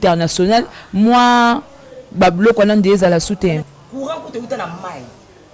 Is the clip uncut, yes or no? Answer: no